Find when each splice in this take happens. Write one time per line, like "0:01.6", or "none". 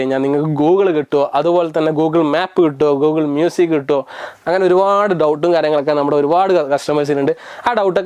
none